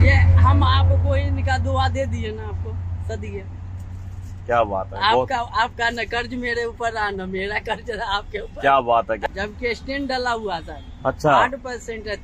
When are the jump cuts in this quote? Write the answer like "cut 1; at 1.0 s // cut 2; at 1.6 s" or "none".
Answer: none

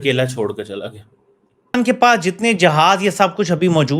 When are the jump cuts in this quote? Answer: cut 1; at 1.7 s

